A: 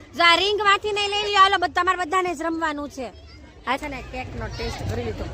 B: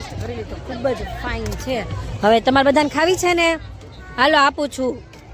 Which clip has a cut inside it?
A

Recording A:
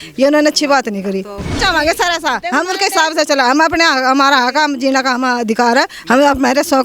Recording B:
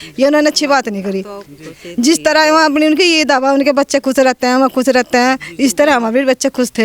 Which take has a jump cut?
A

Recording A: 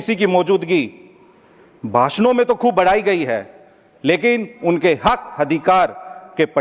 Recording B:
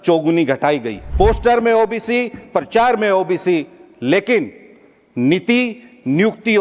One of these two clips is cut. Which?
B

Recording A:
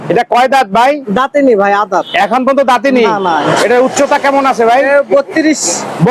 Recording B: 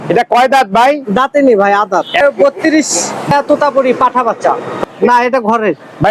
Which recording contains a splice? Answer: B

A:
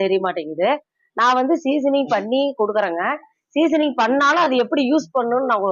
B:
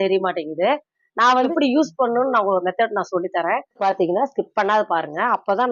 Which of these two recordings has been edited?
B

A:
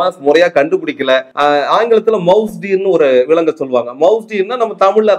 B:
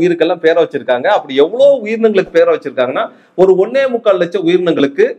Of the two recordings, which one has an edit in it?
A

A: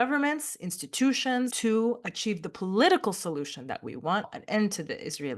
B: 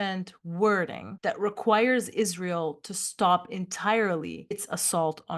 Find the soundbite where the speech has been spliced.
A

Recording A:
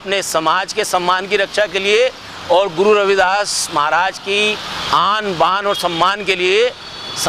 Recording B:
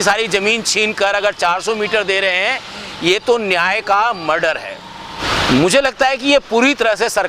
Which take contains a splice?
B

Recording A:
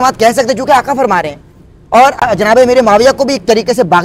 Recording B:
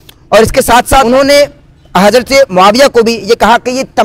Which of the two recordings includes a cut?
B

